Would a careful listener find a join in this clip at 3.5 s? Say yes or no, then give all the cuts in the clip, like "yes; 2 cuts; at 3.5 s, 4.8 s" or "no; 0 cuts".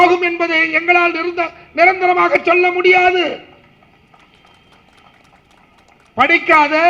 no; 0 cuts